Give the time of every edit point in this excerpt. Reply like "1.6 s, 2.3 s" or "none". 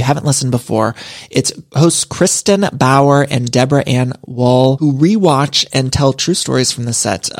none